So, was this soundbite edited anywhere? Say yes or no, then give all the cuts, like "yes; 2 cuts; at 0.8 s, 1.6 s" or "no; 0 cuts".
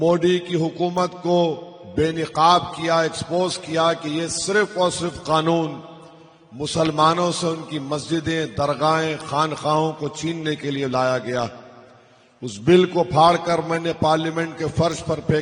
no; 0 cuts